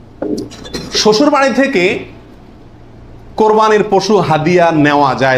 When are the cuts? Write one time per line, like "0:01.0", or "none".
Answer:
none